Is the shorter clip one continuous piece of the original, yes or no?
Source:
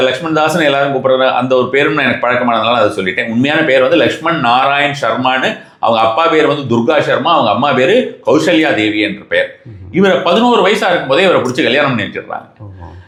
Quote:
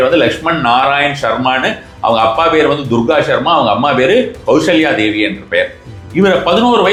yes